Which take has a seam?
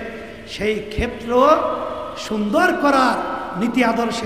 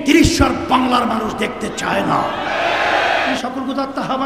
second; 1 cut; at 3.4 s

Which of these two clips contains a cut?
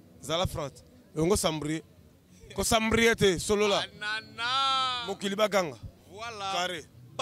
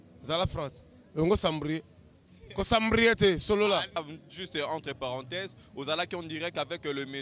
second; 1 cut; at 4.0 s

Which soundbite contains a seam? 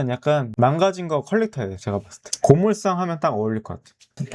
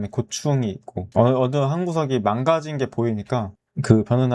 first; 1 cut; at 2.2 s

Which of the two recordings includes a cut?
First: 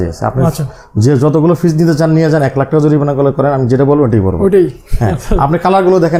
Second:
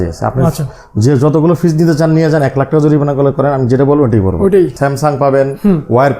second; 1 cut; at 4.8 s

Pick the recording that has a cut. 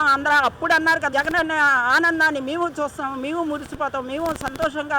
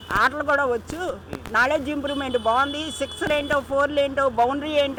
first; 1 cut; at 1.1 s

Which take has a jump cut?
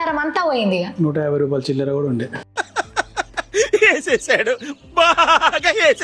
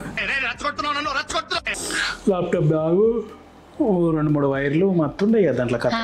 second; 1 cut; at 1.8 s

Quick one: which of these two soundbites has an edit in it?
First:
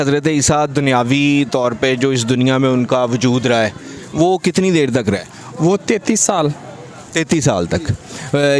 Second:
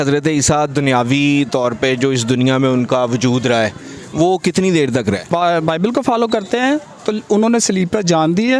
second; 1 cut; at 5.3 s

